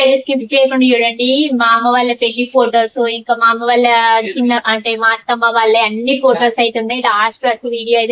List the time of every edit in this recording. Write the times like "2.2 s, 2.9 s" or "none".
none